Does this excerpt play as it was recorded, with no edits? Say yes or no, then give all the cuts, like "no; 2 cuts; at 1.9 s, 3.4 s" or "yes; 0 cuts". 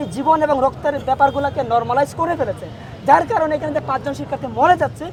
yes; 0 cuts